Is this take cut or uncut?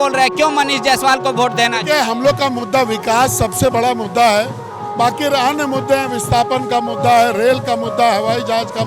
uncut